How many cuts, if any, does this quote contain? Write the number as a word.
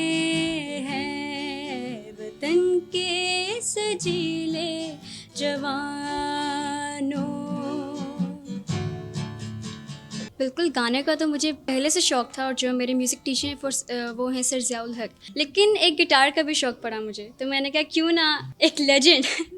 four